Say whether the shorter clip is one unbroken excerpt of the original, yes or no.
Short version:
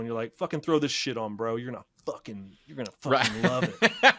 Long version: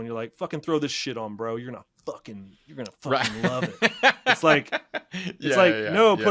yes